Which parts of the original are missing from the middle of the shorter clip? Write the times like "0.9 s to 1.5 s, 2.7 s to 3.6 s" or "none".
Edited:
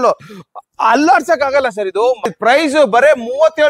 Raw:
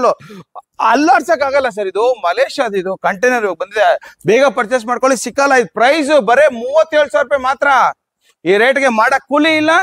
2.3 s to 5.6 s